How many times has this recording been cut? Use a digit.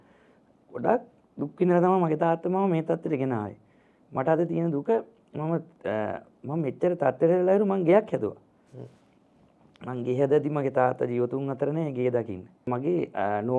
1